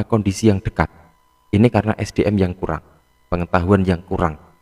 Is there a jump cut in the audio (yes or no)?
no